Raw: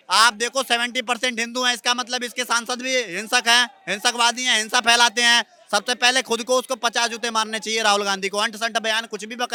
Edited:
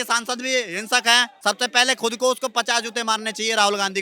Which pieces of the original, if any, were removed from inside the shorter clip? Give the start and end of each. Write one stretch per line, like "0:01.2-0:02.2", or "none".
0:03.7-0:05.6